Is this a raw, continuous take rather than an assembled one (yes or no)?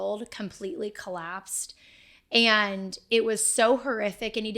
yes